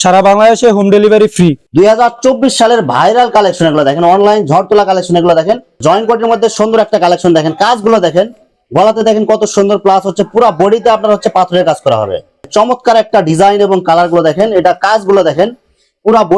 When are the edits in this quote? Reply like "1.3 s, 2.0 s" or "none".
1.6 s, 5.7 s, 12.5 s